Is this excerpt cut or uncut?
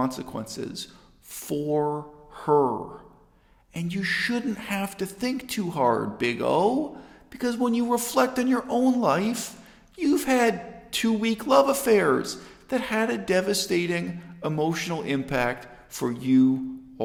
uncut